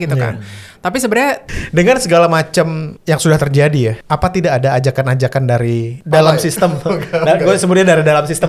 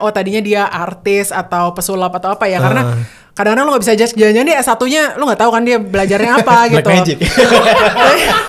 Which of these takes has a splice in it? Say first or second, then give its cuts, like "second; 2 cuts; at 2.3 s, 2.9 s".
first; 4 cuts; at 1.5 s, 2.9 s, 4.0 s, 5.9 s